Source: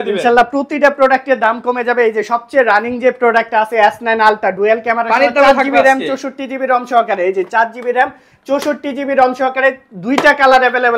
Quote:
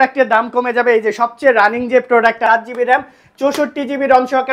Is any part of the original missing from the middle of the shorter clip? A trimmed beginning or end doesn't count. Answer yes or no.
yes